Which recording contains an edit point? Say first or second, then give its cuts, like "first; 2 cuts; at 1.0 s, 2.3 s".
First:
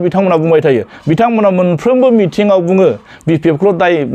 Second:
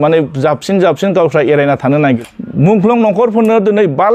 second; 1 cut; at 2.2 s